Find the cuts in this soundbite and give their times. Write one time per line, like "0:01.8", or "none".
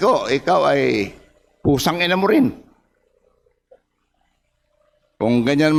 none